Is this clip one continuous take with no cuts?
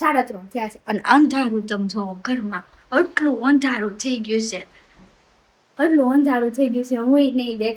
yes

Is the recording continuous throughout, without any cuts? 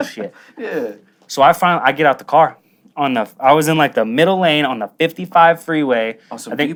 yes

